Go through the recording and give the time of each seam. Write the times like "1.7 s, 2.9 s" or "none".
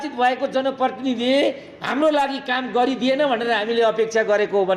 none